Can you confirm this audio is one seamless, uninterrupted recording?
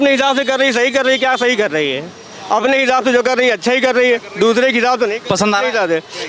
yes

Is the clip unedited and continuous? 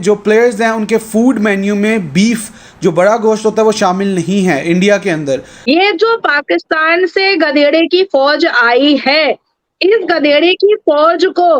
no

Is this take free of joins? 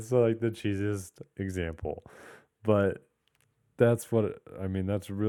yes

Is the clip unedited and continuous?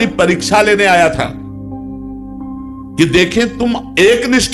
yes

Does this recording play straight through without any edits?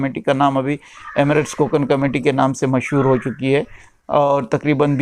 yes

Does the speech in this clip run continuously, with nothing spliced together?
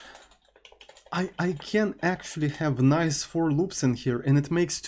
yes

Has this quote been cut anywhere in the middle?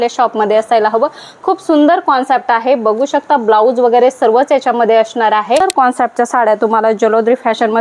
yes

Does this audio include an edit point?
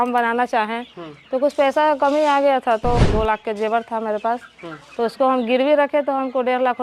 yes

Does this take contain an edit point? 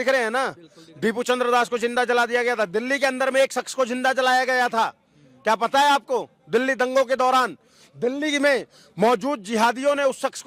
no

